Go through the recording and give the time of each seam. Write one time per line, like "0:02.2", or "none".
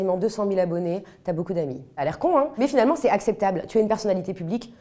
none